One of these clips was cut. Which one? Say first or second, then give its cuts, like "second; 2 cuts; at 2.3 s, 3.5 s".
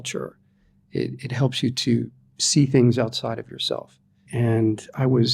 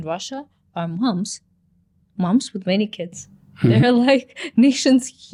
first; 1 cut; at 4.3 s